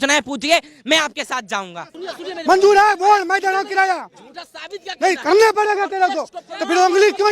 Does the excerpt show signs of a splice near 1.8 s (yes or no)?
yes